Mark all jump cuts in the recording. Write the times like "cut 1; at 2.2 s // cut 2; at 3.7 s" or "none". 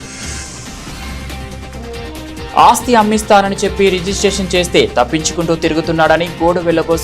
cut 1; at 1.1 s